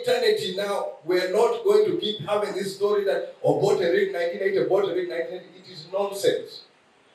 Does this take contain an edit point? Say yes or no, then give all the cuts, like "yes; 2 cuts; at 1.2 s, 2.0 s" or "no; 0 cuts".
no; 0 cuts